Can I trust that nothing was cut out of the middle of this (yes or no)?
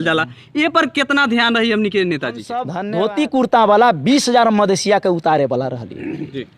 no